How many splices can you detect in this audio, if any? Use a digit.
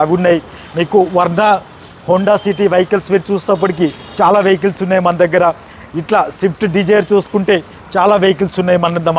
0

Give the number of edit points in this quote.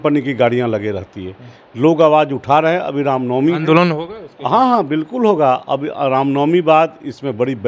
0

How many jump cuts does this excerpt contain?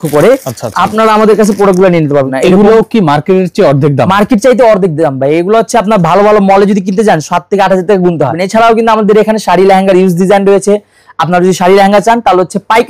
2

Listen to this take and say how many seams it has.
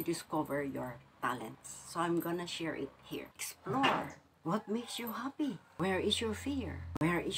1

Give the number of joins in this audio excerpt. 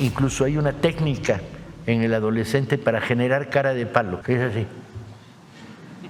1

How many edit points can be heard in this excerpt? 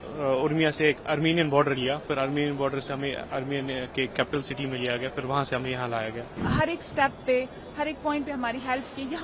1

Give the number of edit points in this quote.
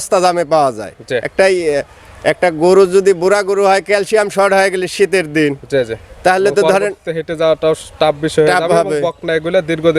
0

